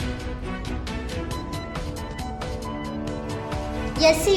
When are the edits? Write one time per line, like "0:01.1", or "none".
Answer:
0:00.9